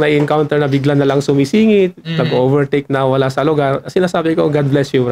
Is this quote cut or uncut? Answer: uncut